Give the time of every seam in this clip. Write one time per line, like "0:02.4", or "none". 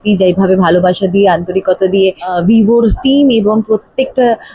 0:02.3